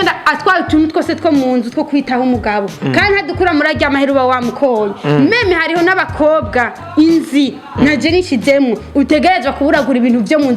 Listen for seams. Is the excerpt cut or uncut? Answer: uncut